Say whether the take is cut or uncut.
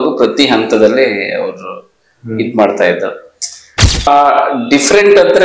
cut